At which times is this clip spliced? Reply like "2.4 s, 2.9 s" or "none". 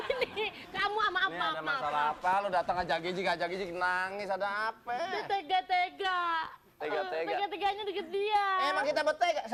none

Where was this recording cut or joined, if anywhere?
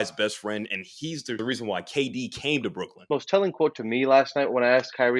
1.5 s, 2.9 s

